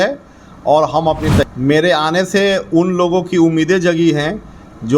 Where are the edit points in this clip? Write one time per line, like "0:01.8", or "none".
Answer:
0:01.4